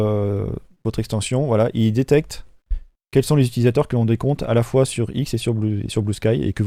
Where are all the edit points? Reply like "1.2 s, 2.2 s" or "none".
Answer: none